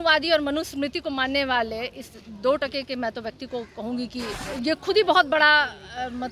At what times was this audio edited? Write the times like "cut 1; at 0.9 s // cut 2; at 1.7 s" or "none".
cut 1; at 4.4 s